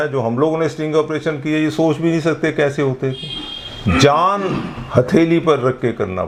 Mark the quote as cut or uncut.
uncut